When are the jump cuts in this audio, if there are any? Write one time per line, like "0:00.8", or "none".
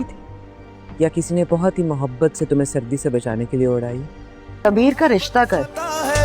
0:04.7